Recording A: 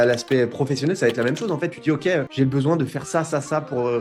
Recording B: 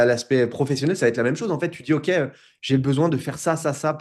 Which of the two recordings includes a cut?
A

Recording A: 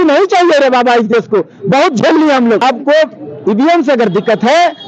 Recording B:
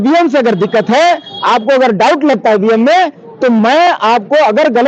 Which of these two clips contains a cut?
A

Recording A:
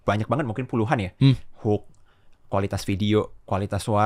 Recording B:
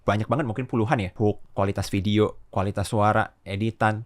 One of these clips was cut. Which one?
B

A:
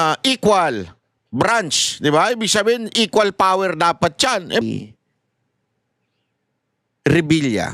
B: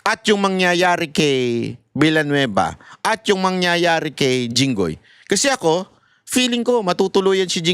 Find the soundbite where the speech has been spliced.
A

